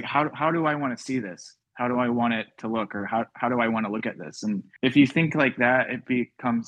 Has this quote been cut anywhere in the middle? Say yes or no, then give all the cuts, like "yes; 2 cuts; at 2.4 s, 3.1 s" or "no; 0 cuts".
no; 0 cuts